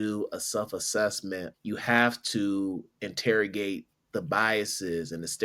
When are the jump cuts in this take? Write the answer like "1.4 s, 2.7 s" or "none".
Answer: 1.5 s